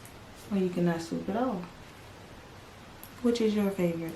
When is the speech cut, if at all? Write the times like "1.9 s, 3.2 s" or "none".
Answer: 2.6 s